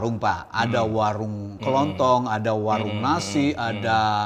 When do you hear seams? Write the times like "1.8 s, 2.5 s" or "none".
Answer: none